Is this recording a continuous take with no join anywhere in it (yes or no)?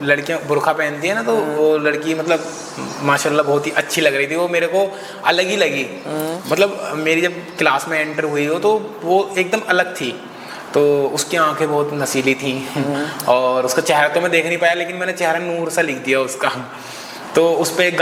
yes